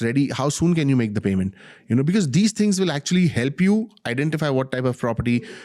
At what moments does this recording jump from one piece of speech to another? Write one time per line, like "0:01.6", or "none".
none